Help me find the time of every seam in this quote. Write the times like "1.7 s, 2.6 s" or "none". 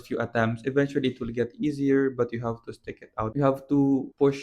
3.2 s